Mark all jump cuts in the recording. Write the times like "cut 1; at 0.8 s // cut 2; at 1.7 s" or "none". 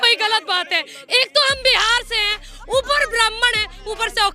cut 1; at 1.0 s